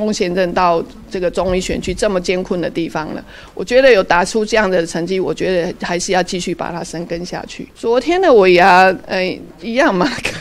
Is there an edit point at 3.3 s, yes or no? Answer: no